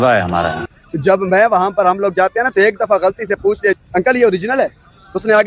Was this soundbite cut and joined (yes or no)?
no